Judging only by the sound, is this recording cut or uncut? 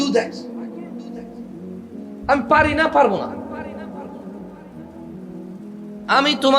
uncut